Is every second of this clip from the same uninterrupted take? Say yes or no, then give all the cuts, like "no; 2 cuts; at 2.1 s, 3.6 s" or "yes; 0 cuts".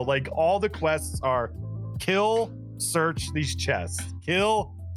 yes; 0 cuts